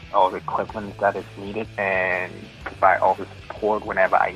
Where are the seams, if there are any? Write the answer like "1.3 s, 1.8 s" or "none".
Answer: 1.6 s, 3.3 s